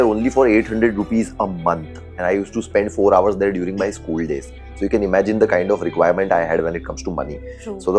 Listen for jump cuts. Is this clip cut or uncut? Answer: uncut